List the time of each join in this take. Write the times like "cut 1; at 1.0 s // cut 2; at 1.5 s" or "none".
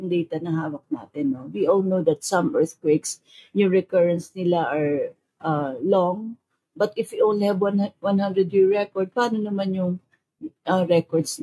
none